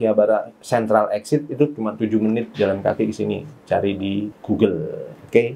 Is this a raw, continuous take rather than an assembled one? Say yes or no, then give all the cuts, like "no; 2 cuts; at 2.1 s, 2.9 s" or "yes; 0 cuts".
yes; 0 cuts